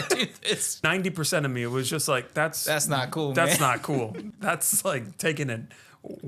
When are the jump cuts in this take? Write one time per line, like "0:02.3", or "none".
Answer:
0:00.8
0:04.2